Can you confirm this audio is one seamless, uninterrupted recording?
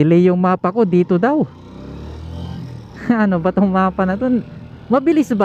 no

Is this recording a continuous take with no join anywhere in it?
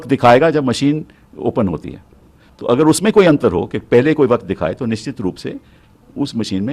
yes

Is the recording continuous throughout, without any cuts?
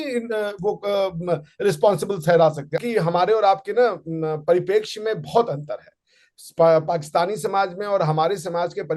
no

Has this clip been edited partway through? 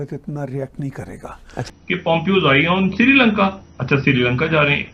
yes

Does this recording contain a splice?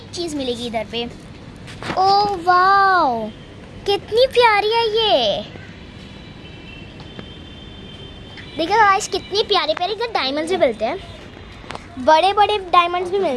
no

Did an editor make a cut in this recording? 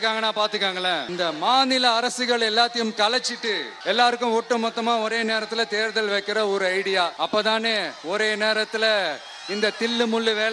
yes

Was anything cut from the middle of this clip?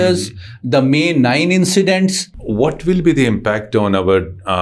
yes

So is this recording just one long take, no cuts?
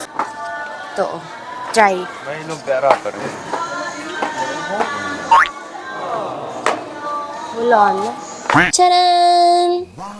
no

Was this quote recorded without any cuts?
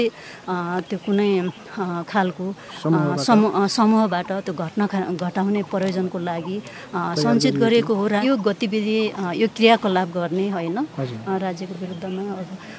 no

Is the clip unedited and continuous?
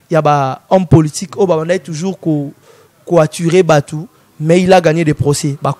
yes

